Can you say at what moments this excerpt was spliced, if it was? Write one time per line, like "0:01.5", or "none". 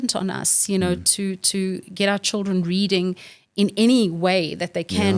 none